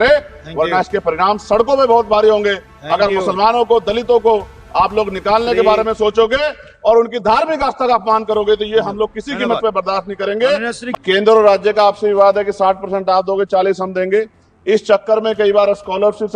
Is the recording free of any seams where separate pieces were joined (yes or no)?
no